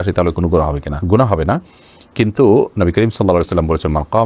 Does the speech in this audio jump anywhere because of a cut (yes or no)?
no